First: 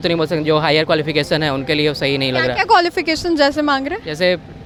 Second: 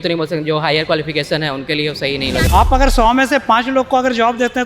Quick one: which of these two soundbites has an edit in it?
second; 1 cut; at 2.5 s

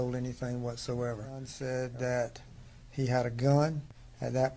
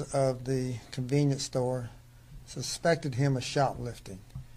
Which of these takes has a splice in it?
first; 1 cut; at 1.5 s

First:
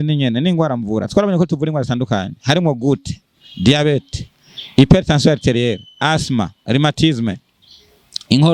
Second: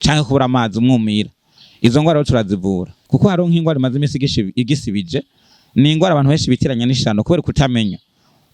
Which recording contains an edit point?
second; 1 cut; at 2.9 s

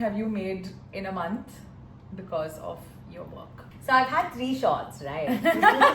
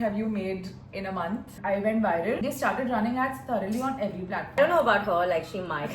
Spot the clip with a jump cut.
second; 3 cuts; at 1.5 s, 2.4 s, 4.6 s

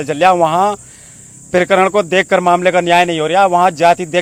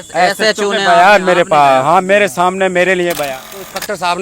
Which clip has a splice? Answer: second; 1 cut; at 3.3 s

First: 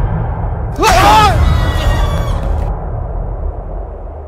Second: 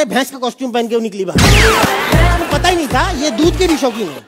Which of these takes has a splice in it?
second; 1 cut; at 1.9 s

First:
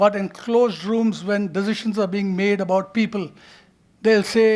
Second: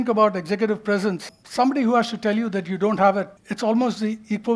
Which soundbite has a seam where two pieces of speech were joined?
second; 2 cuts; at 1.4 s, 3.4 s

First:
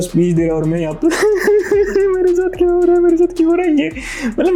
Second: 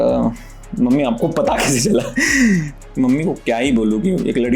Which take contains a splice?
second; 1 cut; at 2.7 s

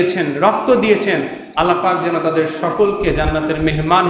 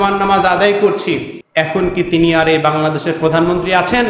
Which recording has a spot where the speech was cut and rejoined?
second; 1 cut; at 1.4 s

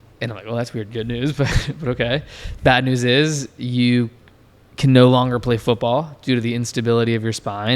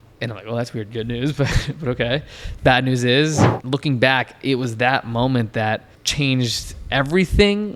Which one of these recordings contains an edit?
second; 2 cuts; at 3.5 s, 6.0 s

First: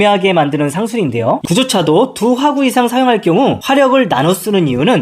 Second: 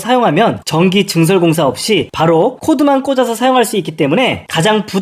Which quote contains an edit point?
first; 1 cut; at 1.4 s

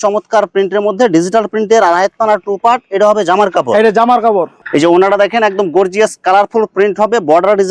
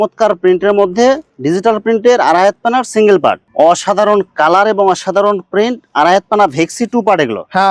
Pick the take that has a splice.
second; 1 cut; at 3.5 s

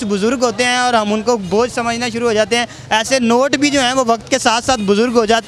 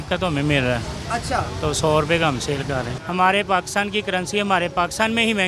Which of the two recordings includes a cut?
second; 1 cut; at 3.0 s

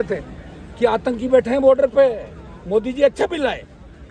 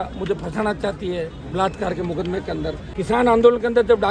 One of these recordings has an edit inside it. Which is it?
second; 1 cut; at 2.8 s

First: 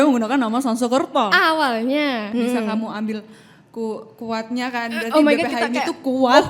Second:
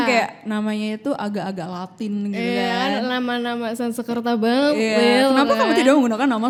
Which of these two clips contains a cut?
first; 1 cut; at 2.3 s

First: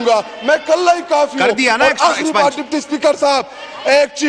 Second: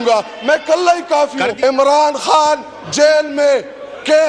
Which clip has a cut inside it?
second; 1 cut; at 1.4 s

